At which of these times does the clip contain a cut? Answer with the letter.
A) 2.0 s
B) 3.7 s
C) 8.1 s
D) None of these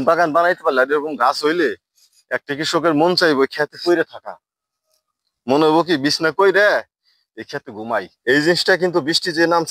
C